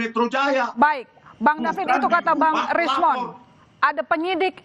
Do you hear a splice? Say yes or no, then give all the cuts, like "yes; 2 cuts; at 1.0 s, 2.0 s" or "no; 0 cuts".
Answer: no; 0 cuts